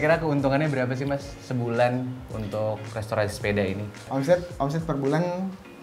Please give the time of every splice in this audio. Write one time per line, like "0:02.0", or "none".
0:04.1